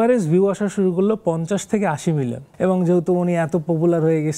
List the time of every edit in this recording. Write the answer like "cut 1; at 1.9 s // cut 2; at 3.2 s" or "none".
cut 1; at 2.4 s